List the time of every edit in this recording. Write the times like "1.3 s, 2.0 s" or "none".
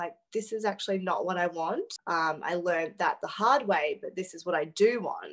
2.0 s